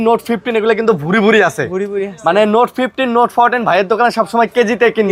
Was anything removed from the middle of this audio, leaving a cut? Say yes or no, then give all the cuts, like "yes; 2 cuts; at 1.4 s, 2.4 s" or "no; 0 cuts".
no; 0 cuts